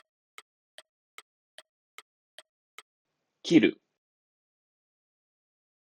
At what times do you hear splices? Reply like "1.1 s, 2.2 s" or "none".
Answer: 2.9 s